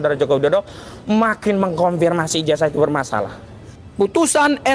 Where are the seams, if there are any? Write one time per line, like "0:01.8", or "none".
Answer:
0:03.8